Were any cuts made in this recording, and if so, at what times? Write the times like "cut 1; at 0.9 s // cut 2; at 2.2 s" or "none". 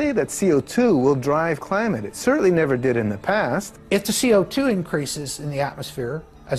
cut 1; at 3.7 s